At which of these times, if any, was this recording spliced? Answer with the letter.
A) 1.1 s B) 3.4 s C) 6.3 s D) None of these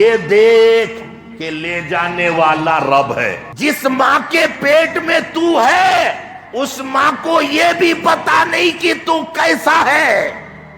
B